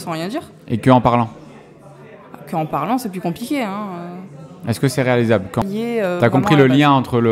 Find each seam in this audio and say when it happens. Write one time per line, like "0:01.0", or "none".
0:05.6